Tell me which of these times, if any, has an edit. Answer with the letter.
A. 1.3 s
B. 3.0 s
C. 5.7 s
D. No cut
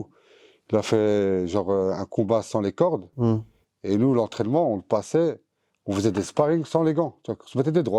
D